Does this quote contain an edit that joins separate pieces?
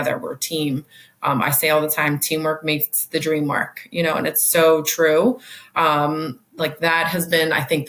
no; 0 cuts

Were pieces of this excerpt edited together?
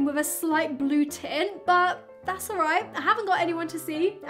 no; 0 cuts

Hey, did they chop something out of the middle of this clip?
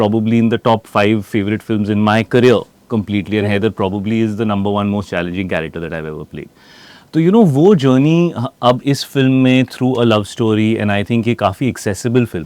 no; 0 cuts

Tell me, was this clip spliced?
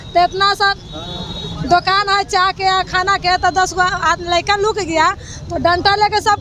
no; 0 cuts

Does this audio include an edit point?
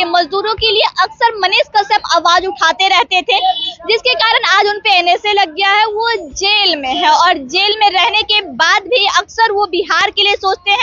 no; 0 cuts

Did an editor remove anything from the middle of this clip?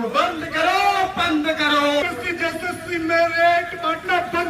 yes; 1 cut; at 2.0 s

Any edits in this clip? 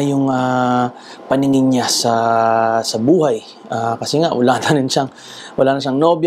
no; 0 cuts

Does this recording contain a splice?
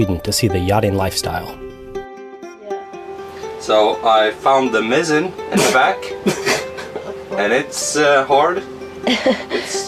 no; 0 cuts

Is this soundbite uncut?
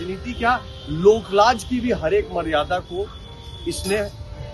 yes; 0 cuts

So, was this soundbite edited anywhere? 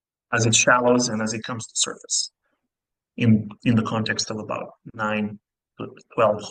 no; 0 cuts

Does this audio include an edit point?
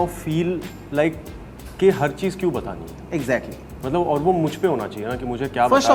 no; 0 cuts

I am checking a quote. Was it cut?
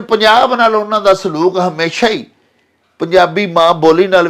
no; 0 cuts

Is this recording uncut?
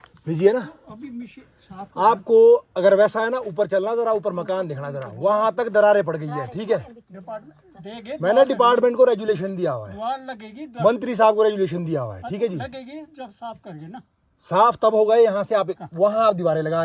yes; 0 cuts

